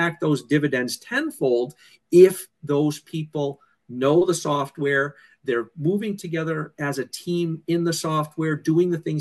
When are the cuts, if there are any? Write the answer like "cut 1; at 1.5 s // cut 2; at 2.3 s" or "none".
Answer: none